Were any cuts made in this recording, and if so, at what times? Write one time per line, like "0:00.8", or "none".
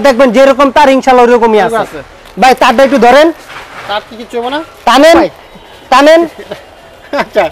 none